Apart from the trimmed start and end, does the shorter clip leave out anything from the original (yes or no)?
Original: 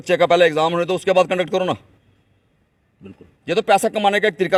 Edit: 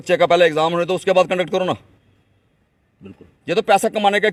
no